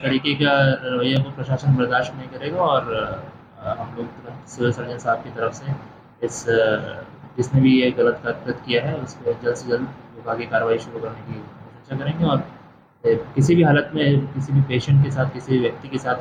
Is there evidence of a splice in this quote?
no; 0 cuts

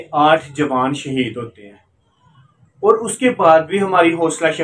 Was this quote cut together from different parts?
no; 0 cuts

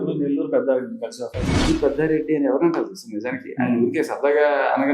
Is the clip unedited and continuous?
no; 1 cut; at 1.5 s

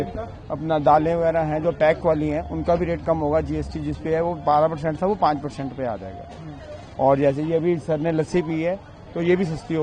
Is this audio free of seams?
yes; 0 cuts

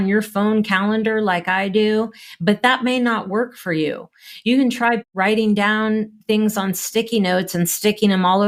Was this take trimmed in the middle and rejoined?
no; 0 cuts

